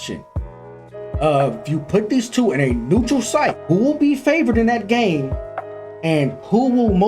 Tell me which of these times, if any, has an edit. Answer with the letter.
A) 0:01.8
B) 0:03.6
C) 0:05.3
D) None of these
B